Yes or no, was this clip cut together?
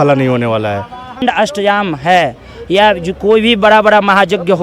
yes